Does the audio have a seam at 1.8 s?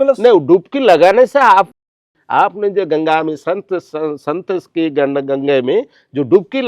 yes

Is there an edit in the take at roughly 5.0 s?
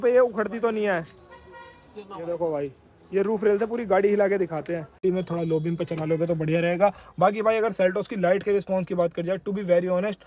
yes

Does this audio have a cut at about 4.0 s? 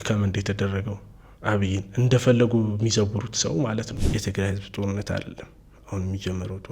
yes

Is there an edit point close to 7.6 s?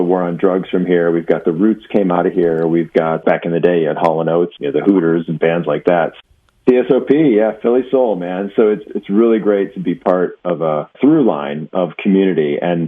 no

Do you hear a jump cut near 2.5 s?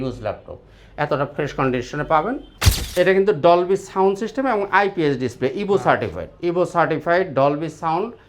yes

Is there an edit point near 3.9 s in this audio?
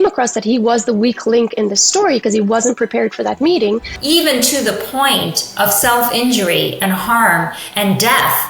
yes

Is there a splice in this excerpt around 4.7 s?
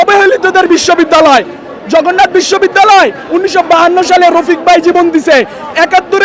no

